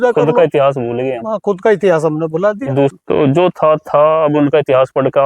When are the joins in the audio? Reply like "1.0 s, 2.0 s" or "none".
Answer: 2.9 s